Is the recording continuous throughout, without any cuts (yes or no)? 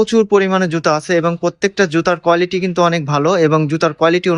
yes